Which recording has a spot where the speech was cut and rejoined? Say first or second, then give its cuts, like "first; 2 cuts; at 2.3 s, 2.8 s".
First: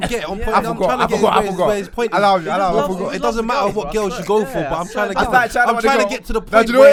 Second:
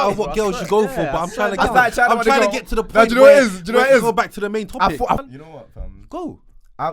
second; 1 cut; at 5.2 s